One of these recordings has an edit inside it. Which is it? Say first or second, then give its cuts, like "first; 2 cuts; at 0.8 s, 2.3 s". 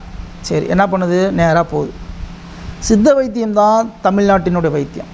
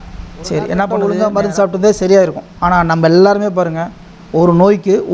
second; 1 cut; at 0.9 s